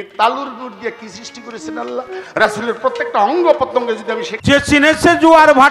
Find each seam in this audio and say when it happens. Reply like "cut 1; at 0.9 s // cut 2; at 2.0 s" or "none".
cut 1; at 4.3 s